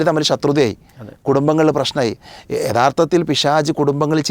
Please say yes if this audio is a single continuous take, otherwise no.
yes